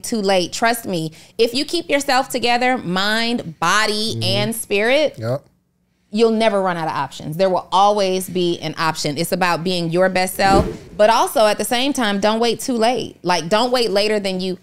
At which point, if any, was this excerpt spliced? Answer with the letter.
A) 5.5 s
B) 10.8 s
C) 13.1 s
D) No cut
B